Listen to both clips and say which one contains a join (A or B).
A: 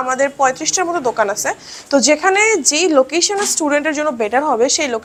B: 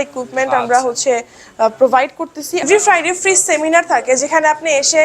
B